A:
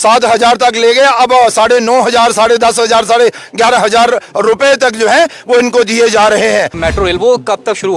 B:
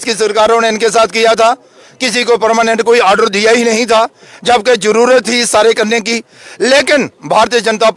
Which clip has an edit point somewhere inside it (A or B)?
A